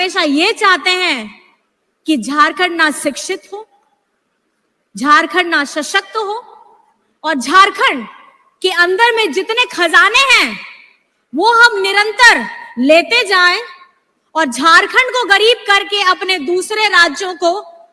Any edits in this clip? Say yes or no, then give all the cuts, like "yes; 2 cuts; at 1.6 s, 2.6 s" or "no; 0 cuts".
no; 0 cuts